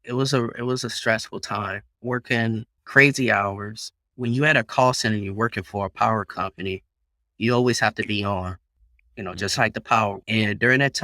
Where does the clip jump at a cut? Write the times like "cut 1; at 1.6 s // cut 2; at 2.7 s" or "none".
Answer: cut 1; at 1.8 s // cut 2; at 2.8 s // cut 3; at 4.0 s // cut 4; at 10.2 s